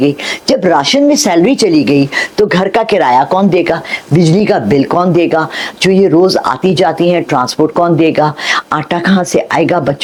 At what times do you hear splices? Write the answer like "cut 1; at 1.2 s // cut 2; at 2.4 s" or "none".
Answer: none